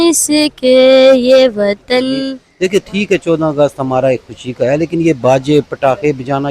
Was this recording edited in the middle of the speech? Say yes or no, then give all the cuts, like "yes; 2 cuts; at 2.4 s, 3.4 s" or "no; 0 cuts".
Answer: yes; 1 cut; at 2.4 s